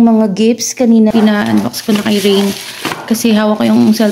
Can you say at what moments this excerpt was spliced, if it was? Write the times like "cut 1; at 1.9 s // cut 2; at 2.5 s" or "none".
cut 1; at 1.1 s